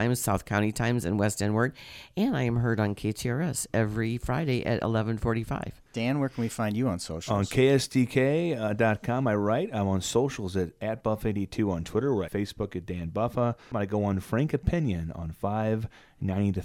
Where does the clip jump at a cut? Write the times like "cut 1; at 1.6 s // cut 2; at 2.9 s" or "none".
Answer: cut 1; at 5.8 s // cut 2; at 12.3 s // cut 3; at 13.7 s